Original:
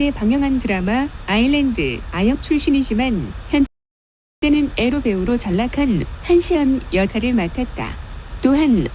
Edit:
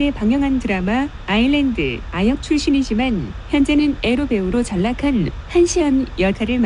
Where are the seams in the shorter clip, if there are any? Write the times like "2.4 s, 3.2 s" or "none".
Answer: 3.7 s